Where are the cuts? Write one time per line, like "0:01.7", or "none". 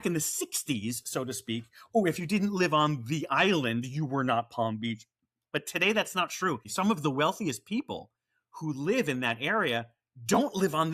none